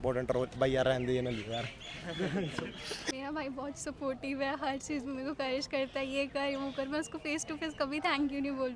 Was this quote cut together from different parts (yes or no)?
yes